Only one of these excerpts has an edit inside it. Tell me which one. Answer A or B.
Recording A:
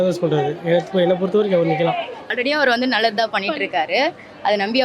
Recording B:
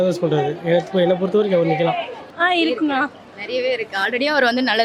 A